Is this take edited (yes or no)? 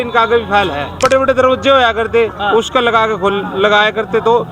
yes